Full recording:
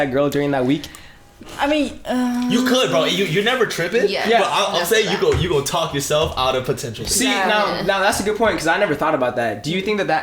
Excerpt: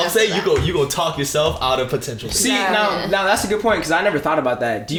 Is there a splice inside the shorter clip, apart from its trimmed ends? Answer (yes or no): no